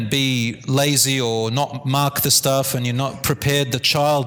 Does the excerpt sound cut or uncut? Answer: uncut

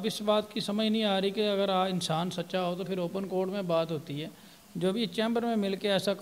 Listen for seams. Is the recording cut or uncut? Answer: uncut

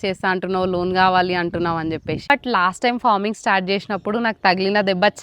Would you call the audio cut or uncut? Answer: cut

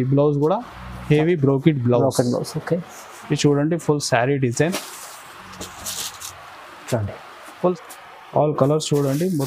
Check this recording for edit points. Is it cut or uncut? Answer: cut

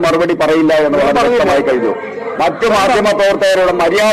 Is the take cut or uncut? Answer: uncut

